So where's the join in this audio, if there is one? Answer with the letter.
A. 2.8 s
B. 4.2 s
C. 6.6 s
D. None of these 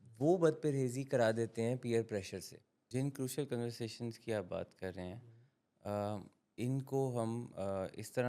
A